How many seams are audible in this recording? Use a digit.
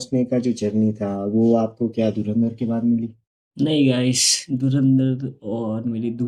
0